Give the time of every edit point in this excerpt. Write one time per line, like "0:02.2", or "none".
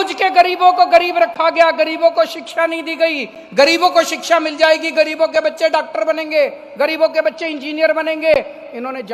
none